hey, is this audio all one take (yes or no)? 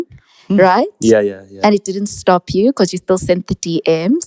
yes